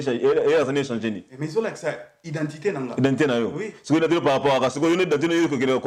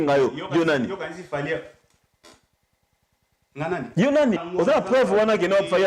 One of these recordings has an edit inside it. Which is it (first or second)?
second